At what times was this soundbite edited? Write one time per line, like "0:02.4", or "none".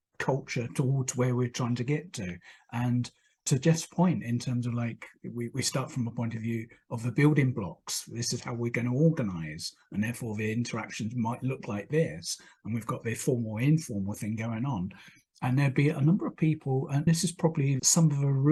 none